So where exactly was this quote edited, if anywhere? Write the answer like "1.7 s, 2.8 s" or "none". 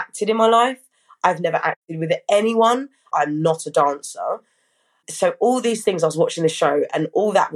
3.1 s, 5.0 s